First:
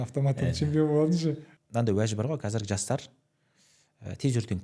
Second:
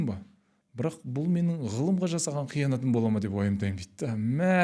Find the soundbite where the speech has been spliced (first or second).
first